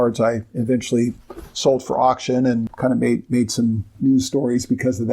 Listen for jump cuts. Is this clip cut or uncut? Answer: cut